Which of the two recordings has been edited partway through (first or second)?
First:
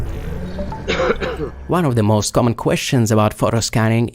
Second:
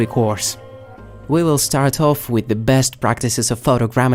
first